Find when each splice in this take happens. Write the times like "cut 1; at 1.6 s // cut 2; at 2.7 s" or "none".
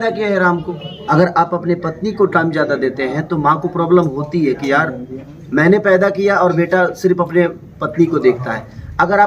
cut 1; at 0.9 s